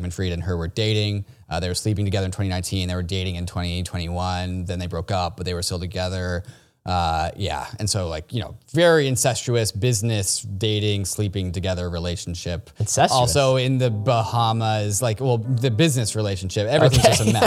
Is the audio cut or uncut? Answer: uncut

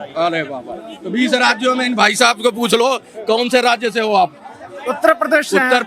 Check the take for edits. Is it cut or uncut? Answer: uncut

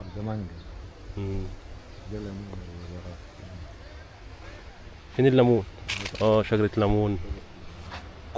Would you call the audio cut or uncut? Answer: uncut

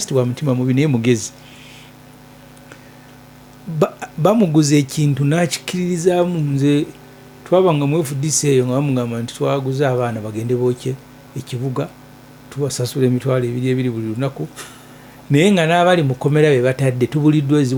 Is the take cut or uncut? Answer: uncut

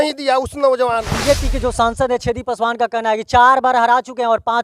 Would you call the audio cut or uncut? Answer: cut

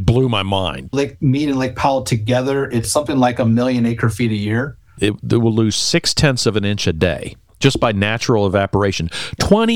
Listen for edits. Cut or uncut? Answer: cut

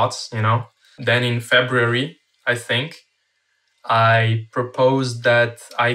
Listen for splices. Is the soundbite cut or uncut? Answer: cut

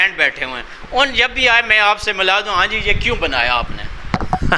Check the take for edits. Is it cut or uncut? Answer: uncut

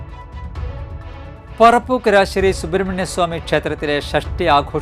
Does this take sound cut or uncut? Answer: cut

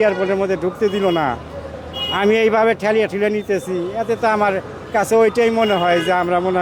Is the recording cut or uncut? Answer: uncut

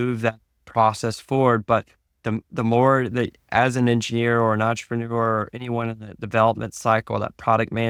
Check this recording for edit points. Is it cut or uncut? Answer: uncut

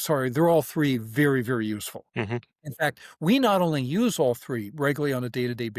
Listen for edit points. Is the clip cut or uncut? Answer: cut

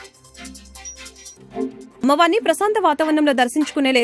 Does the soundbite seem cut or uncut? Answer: cut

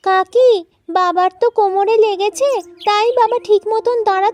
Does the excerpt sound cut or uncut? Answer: uncut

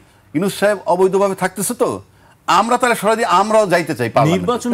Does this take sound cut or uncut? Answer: uncut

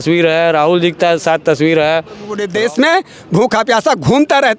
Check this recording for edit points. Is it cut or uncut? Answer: cut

